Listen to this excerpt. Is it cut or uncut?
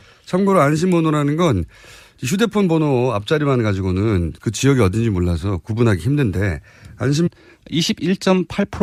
uncut